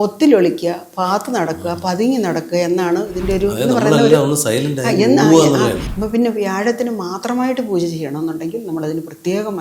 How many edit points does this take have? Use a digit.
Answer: 1